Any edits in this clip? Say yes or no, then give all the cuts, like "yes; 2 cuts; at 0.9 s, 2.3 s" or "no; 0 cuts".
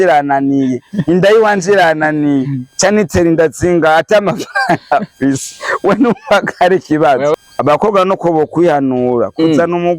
yes; 1 cut; at 7.3 s